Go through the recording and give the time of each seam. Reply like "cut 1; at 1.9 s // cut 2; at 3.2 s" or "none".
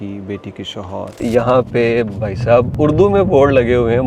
cut 1; at 1.2 s // cut 2; at 2.7 s